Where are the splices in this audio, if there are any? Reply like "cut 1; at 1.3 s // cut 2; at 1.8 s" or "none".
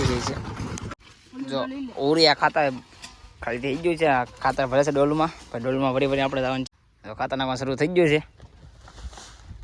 cut 1; at 0.9 s // cut 2; at 6.7 s